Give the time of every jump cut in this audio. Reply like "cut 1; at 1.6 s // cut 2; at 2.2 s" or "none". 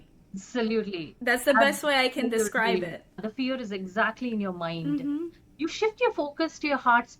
cut 1; at 3.2 s